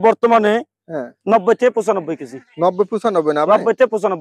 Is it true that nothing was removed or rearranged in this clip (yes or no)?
yes